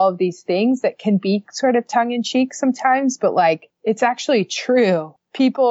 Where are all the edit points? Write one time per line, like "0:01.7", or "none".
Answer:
0:03.7